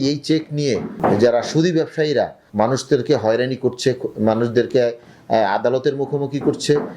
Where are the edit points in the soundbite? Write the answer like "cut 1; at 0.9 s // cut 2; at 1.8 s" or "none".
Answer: cut 1; at 0.9 s // cut 2; at 2.4 s